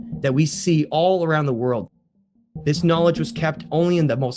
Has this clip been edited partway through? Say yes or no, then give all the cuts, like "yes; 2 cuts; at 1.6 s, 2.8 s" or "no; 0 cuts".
yes; 1 cut; at 2.2 s